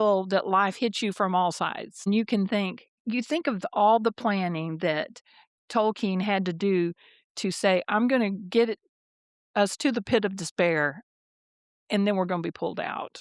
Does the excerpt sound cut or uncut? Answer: uncut